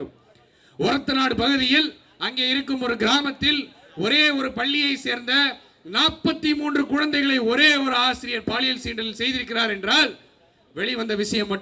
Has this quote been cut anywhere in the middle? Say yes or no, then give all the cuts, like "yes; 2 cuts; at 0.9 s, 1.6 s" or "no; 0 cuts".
no; 0 cuts